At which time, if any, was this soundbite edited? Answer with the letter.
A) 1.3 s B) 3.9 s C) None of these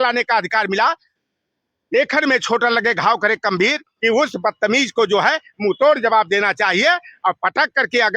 B